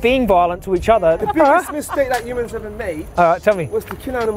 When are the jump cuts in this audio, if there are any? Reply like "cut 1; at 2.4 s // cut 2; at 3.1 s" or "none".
cut 1; at 1.2 s // cut 2; at 3.0 s

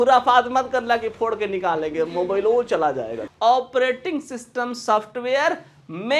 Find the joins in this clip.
cut 1; at 3.2 s

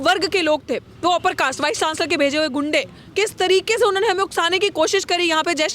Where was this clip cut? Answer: cut 1; at 3.0 s

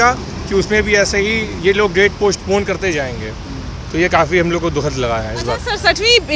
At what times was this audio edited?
none

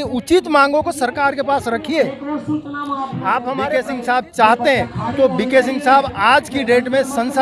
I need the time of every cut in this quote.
cut 1; at 3.7 s

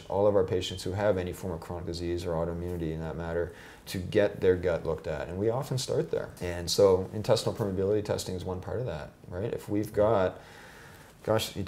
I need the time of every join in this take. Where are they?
cut 1; at 3.9 s // cut 2; at 6.3 s

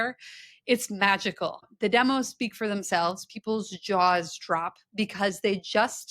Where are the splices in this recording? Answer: cut 1; at 1.7 s

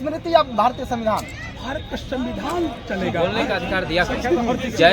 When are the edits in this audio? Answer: cut 1; at 3.2 s

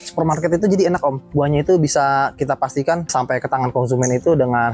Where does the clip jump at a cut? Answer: cut 1; at 3.1 s

